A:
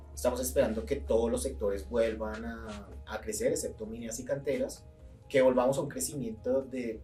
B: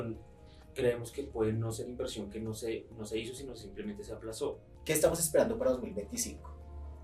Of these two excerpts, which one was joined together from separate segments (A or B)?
B